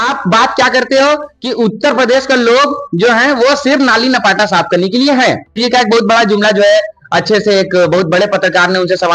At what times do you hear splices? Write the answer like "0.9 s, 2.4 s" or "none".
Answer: 5.6 s